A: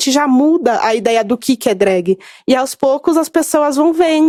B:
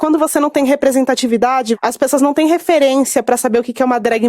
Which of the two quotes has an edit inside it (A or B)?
B